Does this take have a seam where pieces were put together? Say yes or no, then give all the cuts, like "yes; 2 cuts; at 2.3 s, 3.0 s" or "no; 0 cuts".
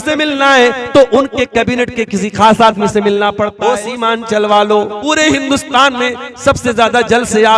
yes; 2 cuts; at 3.5 s, 5.0 s